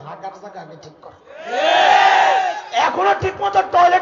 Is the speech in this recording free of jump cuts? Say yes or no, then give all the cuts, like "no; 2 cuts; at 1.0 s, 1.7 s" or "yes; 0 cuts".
yes; 0 cuts